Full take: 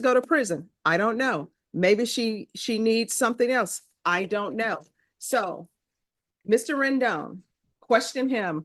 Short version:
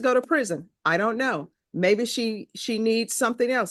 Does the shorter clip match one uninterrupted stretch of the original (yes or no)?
yes